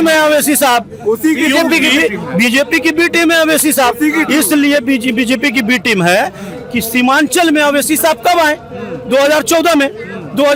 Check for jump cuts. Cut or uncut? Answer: uncut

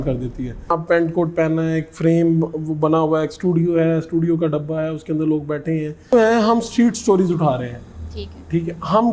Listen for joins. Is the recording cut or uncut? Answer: cut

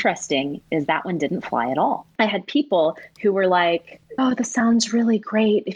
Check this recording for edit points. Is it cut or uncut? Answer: cut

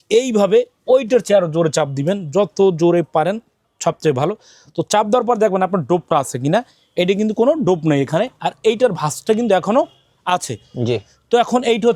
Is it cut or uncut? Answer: uncut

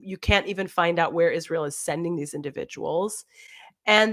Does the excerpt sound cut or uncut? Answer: uncut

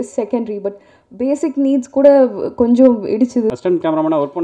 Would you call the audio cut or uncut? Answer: cut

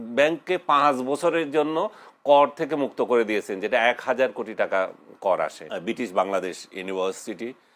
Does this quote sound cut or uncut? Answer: cut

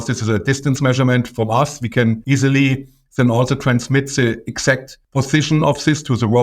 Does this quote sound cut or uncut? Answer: cut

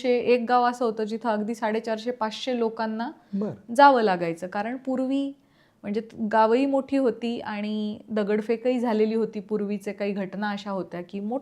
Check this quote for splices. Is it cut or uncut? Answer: uncut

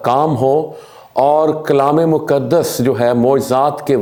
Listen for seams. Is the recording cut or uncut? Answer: uncut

